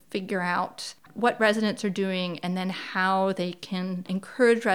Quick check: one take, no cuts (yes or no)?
yes